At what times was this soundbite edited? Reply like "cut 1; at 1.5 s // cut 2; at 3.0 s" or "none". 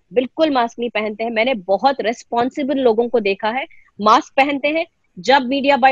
none